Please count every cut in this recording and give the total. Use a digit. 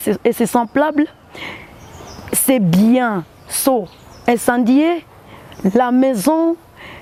0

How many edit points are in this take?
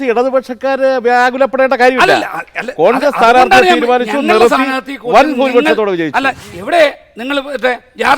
1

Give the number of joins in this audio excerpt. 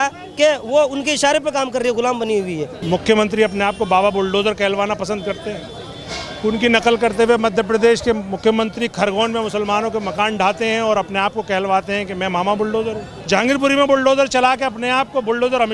2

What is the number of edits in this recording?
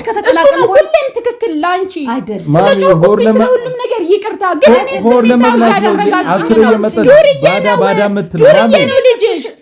0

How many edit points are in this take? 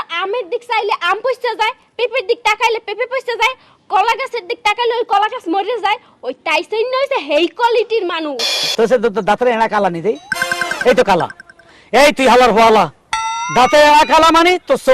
1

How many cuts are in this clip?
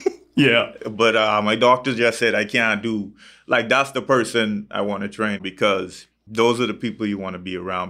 2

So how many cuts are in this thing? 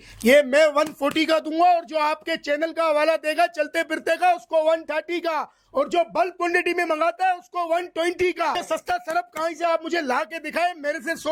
1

